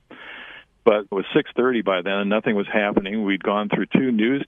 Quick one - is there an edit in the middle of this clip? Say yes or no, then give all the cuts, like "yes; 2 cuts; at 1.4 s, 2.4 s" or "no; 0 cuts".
yes; 1 cut; at 1.1 s